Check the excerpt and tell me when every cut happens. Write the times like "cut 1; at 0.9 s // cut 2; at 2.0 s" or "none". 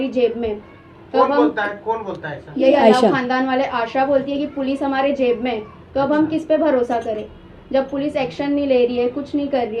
none